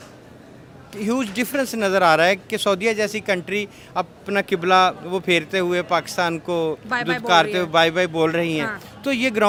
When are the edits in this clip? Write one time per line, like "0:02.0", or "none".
none